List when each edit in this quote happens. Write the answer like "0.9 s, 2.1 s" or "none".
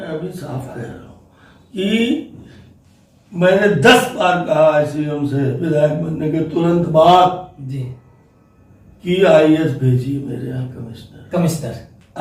none